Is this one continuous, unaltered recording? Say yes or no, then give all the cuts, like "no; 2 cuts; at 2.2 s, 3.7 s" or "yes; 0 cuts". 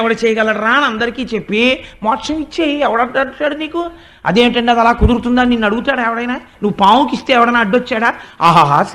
yes; 0 cuts